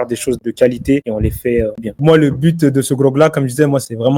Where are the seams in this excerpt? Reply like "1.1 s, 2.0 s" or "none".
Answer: 1.9 s